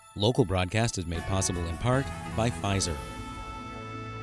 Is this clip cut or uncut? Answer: cut